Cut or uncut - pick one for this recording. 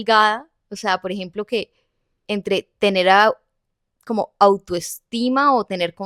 uncut